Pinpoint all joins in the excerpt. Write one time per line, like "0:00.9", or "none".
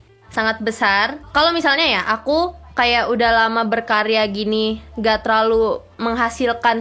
0:01.2